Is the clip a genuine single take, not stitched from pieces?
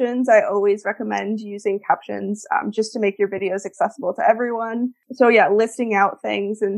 no; 1 cut; at 5.0 s

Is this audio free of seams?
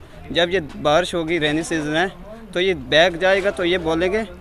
yes; 0 cuts

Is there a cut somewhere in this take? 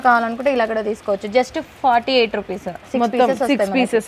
no; 0 cuts

